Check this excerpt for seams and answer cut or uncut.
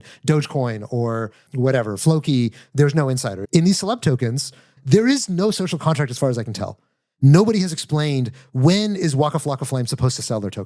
cut